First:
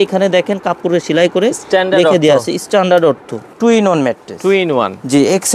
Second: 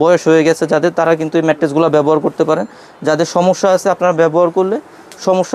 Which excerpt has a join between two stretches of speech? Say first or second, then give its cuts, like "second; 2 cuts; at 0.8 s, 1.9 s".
first; 1 cut; at 3.5 s